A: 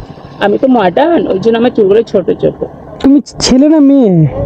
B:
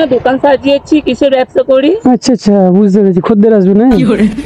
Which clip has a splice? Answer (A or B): A